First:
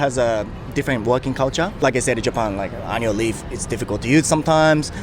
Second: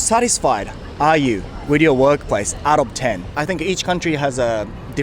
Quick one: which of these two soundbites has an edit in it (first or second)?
second